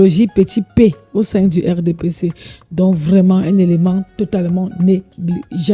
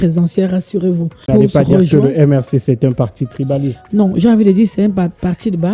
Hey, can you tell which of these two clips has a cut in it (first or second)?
second